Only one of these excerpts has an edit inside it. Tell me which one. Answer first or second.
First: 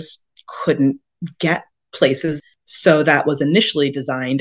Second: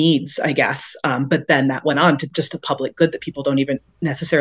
first